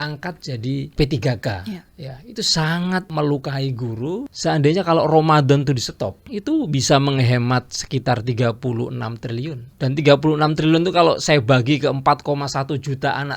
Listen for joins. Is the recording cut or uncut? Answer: cut